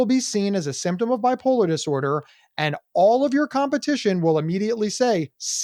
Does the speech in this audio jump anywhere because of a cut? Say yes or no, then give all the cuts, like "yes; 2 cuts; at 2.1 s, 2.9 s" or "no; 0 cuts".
no; 0 cuts